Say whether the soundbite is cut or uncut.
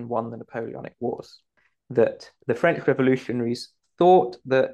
cut